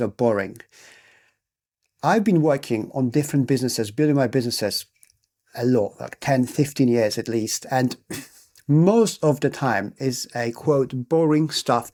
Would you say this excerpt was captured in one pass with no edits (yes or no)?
yes